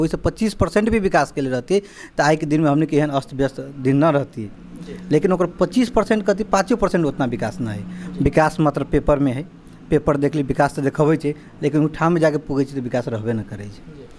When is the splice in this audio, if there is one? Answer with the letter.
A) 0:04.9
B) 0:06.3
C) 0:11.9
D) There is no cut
D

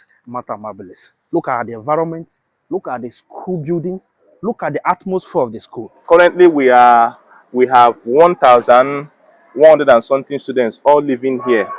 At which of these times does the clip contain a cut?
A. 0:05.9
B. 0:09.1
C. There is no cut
A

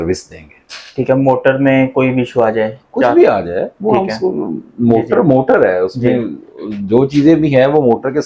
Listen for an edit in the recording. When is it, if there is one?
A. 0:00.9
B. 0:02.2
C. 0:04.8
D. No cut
D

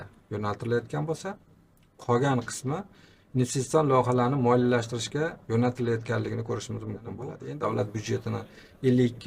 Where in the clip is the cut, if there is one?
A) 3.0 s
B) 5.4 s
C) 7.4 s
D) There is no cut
C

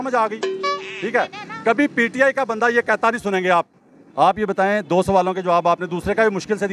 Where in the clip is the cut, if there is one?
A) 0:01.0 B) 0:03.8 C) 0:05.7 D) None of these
B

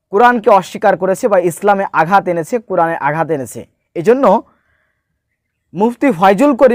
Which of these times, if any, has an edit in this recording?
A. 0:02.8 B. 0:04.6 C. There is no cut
C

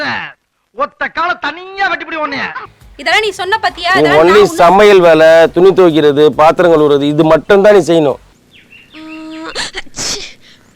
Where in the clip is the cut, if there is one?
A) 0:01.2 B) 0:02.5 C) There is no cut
B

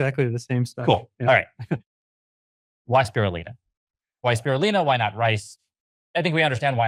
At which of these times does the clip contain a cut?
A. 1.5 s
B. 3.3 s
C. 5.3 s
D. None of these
D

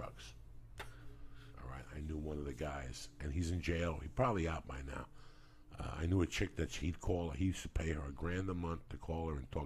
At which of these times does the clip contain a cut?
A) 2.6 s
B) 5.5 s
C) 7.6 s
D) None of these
D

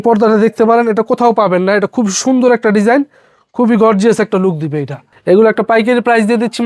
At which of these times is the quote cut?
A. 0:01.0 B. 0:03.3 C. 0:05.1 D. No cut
C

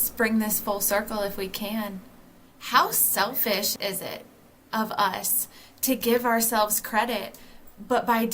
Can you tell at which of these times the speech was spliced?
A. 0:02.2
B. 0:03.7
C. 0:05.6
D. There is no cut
B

